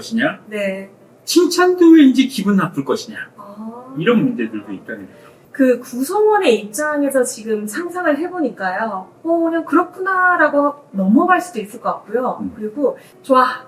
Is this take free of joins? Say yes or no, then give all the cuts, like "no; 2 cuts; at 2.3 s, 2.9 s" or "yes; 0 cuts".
yes; 0 cuts